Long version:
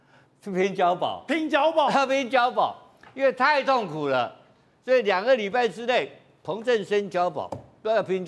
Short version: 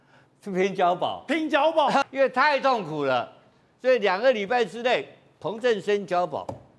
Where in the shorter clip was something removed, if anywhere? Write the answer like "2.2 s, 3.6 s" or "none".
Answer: 2.0 s